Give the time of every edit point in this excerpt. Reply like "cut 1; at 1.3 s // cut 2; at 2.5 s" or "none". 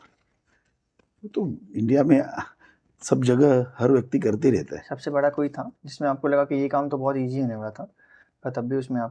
none